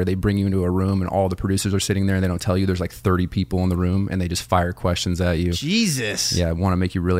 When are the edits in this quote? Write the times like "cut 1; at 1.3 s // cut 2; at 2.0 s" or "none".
none